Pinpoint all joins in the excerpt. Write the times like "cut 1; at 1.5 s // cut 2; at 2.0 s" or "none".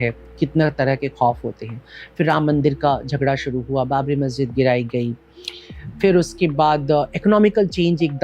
none